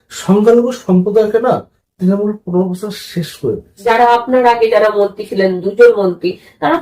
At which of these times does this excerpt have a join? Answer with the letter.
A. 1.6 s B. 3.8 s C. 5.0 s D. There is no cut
B